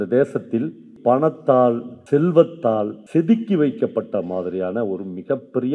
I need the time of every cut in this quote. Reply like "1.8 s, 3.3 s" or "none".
0.9 s, 1.9 s, 3.0 s